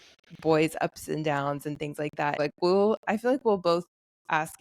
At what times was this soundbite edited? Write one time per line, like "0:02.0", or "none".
0:02.4